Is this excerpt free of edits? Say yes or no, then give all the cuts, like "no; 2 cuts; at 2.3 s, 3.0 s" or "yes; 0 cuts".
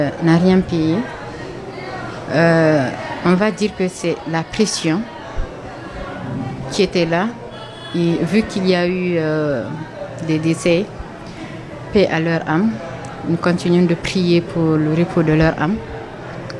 yes; 0 cuts